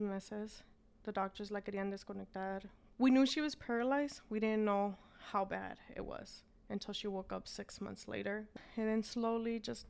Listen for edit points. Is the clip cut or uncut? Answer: cut